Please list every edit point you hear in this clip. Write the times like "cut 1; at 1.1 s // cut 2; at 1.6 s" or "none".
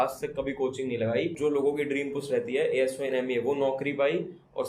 cut 1; at 1.4 s